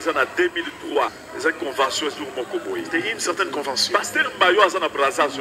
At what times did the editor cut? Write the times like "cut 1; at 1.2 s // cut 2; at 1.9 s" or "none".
cut 1; at 1.2 s